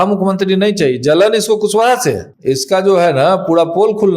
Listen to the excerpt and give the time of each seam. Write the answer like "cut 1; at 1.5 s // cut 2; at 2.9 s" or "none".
cut 1; at 2.3 s

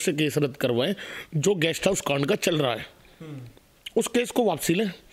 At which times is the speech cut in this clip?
none

